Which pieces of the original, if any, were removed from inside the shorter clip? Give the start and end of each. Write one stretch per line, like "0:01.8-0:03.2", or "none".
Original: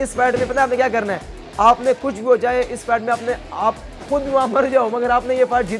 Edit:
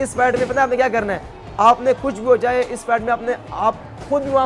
none

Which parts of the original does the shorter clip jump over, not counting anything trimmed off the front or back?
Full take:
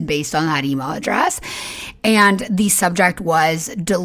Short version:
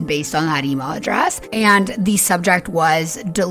0:01.4-0:02.0

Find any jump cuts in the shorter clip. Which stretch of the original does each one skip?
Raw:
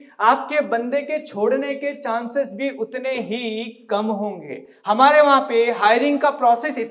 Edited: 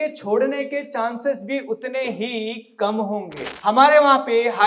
0:04.5-0:04.7

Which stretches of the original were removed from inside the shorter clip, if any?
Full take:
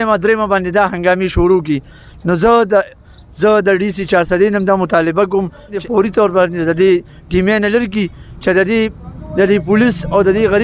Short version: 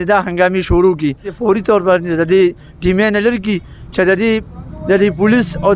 0:01.9-0:05.7

